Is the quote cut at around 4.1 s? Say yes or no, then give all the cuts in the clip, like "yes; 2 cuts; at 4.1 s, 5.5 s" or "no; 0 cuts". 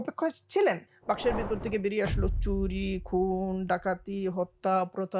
no; 1 cut; at 0.9 s